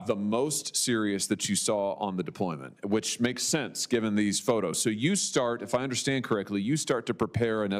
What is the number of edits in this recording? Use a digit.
0